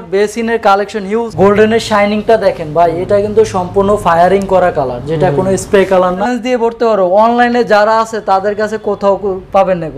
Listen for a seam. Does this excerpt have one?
yes; 2 cuts; at 1.3 s, 6.3 s

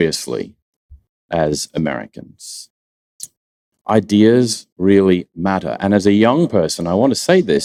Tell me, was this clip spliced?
no; 0 cuts

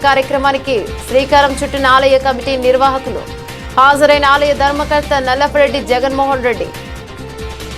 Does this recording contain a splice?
yes; 1 cut; at 6.7 s

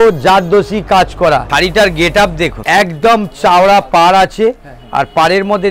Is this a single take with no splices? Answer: no; 2 cuts; at 1.5 s, 2.6 s

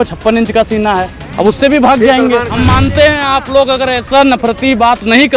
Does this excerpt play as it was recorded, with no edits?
no; 1 cut; at 2.6 s

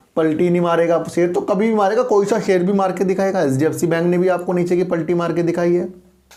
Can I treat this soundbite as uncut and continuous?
yes; 0 cuts

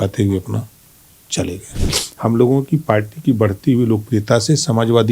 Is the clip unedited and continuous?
no; 1 cut; at 1.7 s

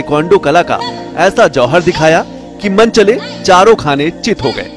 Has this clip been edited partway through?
no; 0 cuts

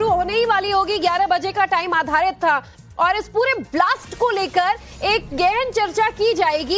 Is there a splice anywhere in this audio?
no; 0 cuts

